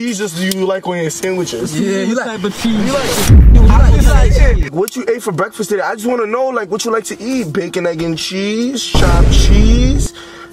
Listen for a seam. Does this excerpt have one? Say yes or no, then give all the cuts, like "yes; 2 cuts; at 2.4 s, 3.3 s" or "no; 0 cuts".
yes; 1 cut; at 4.7 s